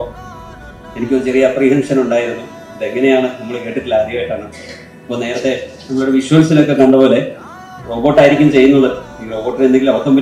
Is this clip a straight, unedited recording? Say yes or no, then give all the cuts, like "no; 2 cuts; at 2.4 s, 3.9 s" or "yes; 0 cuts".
yes; 0 cuts